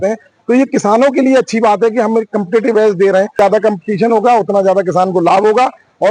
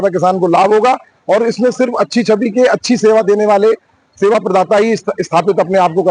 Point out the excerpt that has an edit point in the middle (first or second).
first